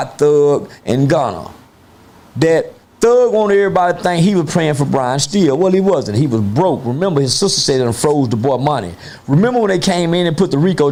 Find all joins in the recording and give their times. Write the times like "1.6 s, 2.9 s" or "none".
none